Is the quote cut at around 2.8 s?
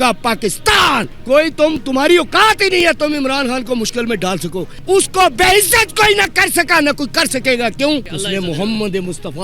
no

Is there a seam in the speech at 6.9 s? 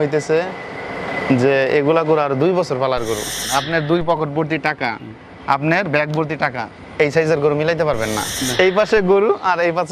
no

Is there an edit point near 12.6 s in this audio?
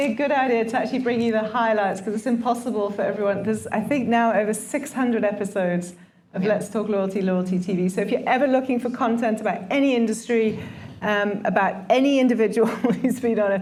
no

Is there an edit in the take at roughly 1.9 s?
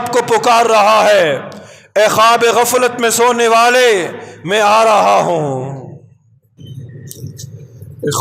no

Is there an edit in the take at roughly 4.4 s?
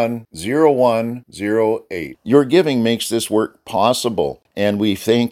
yes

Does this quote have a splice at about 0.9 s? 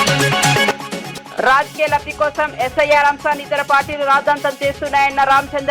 yes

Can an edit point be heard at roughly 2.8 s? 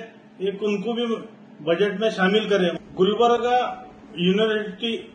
yes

